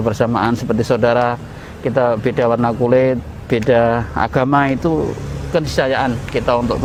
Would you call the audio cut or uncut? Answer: uncut